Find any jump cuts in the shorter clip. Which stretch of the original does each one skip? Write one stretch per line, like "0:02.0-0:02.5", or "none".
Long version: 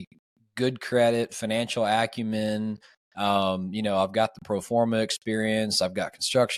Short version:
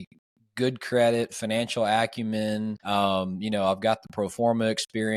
0:02.8-0:03.1